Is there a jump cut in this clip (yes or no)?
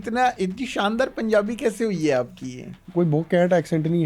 yes